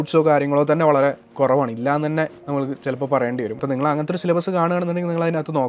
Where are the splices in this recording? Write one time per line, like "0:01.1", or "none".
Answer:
0:03.6